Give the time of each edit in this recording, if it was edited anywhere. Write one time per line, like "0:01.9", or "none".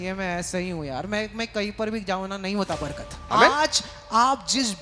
0:03.2